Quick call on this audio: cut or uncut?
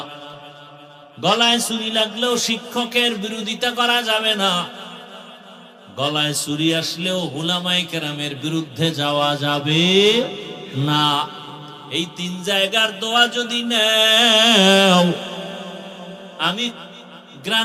uncut